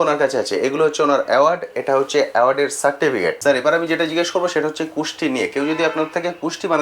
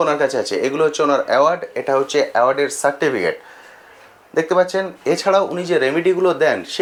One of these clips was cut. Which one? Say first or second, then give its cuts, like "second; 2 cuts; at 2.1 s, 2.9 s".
first; 1 cut; at 3.4 s